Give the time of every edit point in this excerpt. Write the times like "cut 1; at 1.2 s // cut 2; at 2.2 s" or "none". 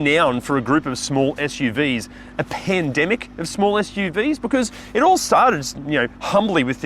none